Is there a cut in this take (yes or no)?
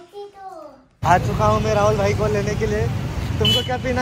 yes